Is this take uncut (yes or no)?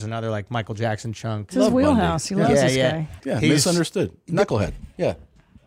no